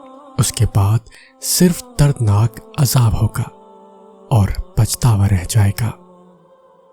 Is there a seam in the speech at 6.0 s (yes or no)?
yes